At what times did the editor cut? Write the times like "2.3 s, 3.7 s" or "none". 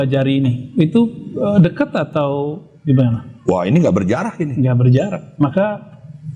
none

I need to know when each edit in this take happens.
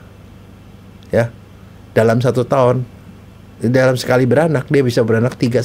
none

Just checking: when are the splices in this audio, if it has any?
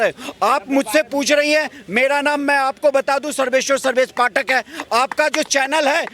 none

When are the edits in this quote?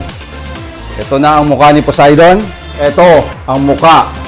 2.6 s

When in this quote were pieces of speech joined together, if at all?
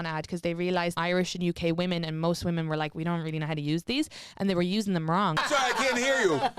0.9 s, 5.4 s

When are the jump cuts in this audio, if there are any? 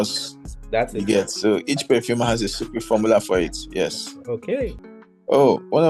4.8 s

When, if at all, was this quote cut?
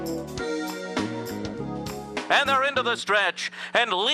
2.2 s

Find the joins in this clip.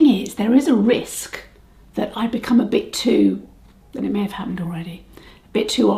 none

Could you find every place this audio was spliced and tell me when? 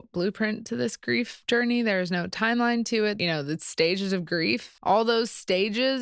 3.2 s, 4.7 s

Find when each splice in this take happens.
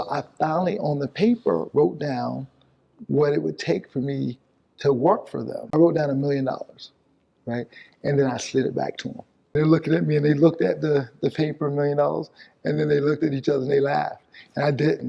5.7 s, 9.4 s

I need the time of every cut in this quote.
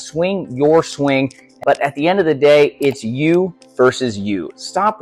1.6 s

